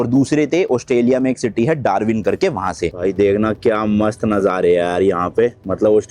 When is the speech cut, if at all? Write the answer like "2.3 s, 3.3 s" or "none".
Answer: 3.0 s